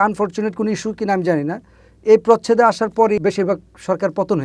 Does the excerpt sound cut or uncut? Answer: cut